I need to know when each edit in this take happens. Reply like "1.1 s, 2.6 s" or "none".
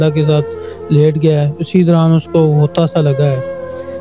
none

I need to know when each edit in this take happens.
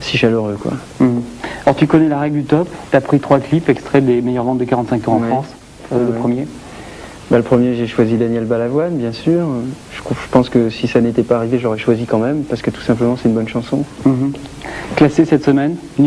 11.4 s

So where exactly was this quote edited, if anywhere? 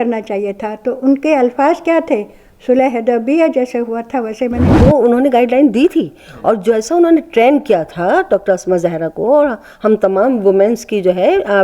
4.7 s

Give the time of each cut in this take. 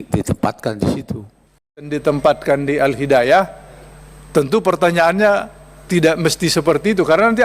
1.9 s

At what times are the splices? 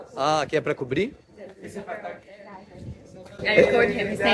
none

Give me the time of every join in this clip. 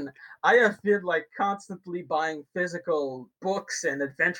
3.3 s

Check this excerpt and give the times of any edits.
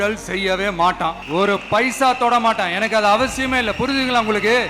1.2 s

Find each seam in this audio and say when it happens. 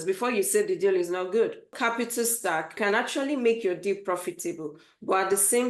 1.7 s, 2.8 s

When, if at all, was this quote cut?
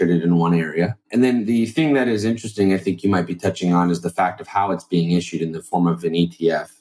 1.0 s

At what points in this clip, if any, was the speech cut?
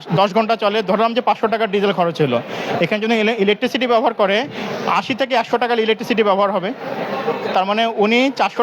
none

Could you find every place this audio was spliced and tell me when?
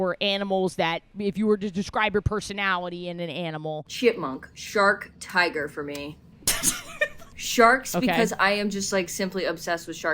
1.1 s, 3.9 s, 6.3 s, 7.3 s

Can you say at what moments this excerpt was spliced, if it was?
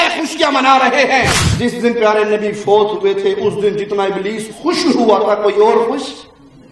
1.4 s

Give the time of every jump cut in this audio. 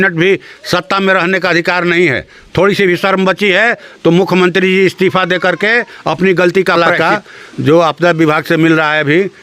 6.8 s

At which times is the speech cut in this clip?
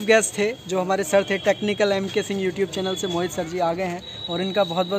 none

